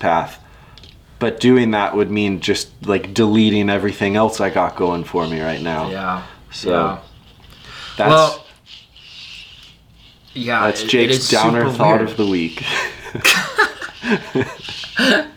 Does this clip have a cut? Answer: no; 0 cuts

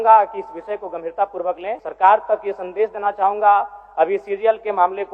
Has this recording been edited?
yes; 1 cut; at 1.8 s

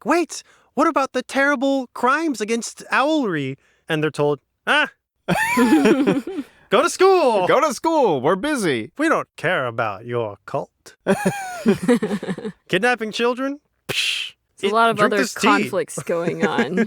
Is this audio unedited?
yes; 0 cuts

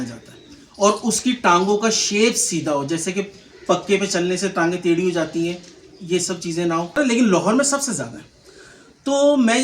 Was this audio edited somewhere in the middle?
yes; 1 cut; at 7.0 s

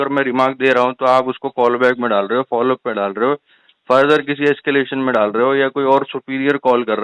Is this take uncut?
yes; 0 cuts

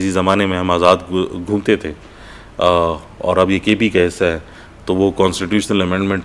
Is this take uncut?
yes; 0 cuts

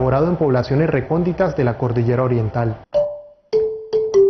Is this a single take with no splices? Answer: yes; 0 cuts

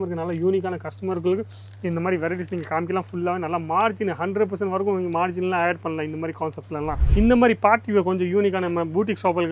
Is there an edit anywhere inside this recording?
yes; 1 cut; at 7.1 s

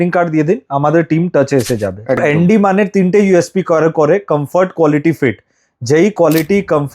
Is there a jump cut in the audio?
yes; 1 cut; at 2.2 s

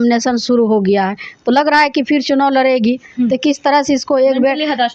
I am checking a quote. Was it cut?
no; 0 cuts

